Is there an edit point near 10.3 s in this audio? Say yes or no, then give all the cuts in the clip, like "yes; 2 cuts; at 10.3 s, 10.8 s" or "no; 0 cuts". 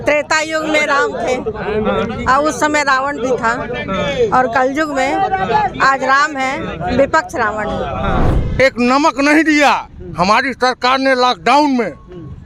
no; 1 cut; at 8.3 s